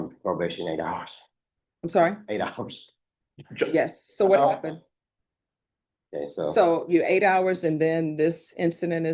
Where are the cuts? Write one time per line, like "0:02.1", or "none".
none